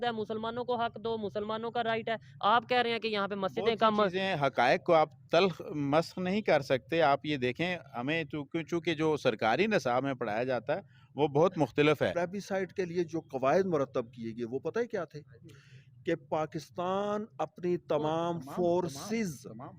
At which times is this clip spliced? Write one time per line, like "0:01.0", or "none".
0:12.1